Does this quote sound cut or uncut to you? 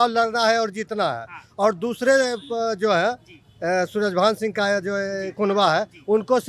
uncut